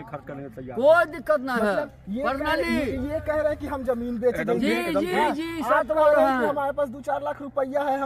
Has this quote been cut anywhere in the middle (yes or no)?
no